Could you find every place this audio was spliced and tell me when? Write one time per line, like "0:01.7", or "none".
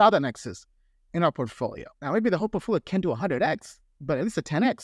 none